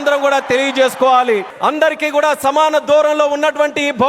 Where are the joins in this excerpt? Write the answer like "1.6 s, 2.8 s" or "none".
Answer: 1.5 s